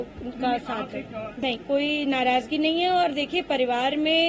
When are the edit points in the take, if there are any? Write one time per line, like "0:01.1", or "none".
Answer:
0:01.0